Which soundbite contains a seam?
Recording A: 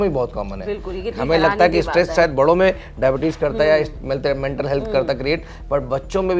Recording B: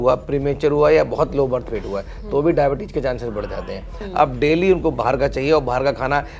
B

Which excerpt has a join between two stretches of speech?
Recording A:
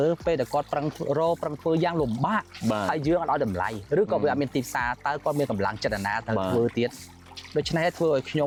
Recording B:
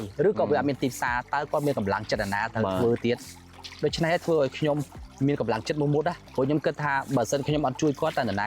B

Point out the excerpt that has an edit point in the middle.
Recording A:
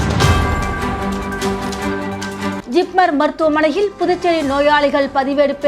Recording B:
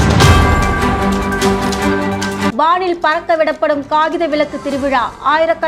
B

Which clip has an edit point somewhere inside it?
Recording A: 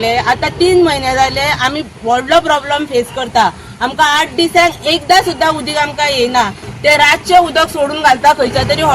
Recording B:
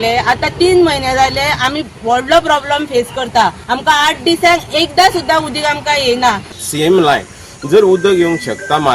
B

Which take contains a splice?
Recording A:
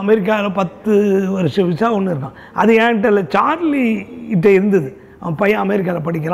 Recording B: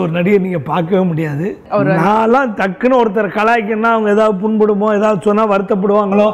B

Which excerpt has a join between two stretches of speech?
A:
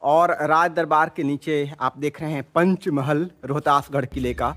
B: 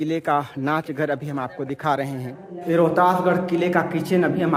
B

